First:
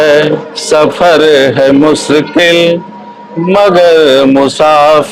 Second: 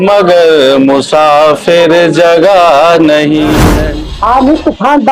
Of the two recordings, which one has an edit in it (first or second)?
second